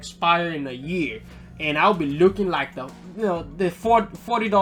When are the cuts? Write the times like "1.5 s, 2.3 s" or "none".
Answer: none